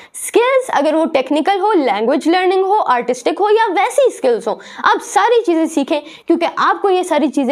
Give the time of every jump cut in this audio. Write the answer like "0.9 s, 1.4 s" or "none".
none